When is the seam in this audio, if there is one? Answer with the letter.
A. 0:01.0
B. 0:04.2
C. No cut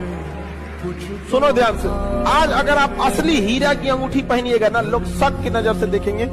C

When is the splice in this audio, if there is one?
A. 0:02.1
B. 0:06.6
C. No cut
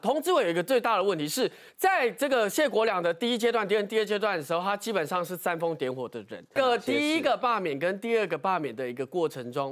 B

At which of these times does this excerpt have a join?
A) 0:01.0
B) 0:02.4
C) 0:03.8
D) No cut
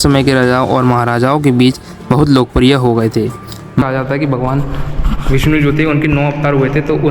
C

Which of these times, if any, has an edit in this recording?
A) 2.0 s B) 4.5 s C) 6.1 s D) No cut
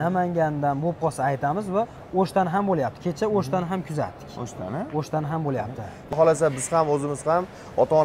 C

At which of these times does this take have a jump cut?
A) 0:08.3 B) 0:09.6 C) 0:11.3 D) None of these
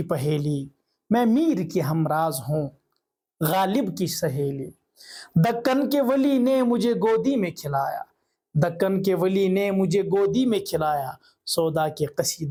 D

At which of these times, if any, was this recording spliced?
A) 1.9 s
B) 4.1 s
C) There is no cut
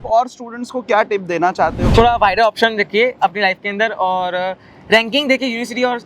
A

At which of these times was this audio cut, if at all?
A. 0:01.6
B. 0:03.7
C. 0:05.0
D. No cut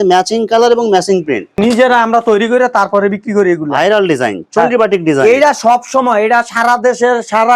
A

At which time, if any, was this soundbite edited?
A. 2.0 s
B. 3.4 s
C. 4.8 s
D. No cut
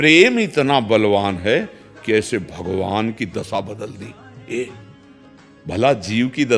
D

